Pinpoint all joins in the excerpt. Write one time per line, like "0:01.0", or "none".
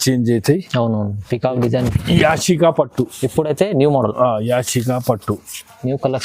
0:01.9